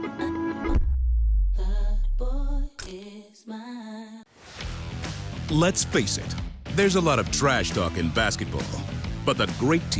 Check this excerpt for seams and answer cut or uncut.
cut